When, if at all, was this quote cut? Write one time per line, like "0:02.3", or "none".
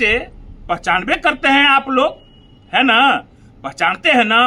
none

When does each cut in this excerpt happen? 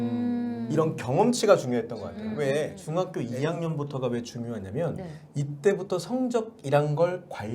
0:02.8

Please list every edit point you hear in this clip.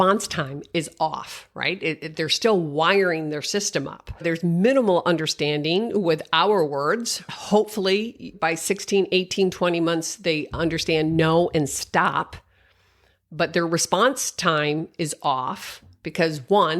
0:04.0
0:07.3
0:08.2

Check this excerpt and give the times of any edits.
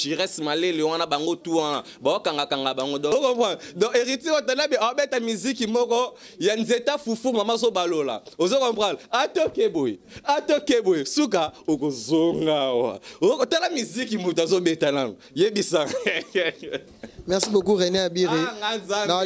0:03.1

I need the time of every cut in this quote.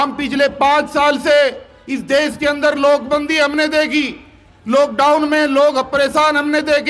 none

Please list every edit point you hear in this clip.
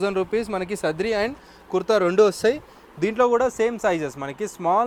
none

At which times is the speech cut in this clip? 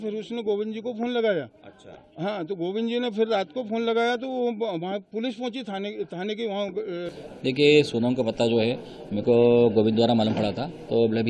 0:07.1

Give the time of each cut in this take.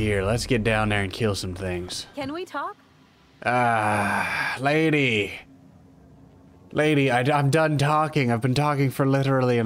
none

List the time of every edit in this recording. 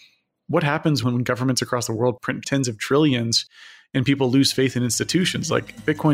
0:01.0
0:02.4

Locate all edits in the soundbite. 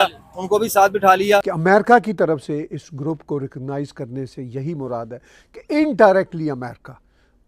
0:01.5

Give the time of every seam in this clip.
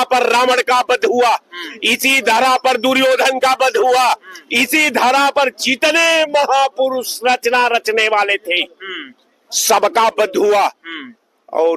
none

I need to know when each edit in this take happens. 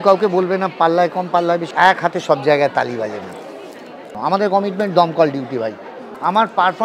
0:01.7
0:04.1

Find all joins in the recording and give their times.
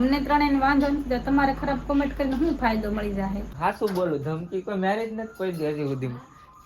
0:03.5

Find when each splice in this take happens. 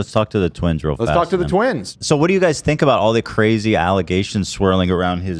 0:01.9

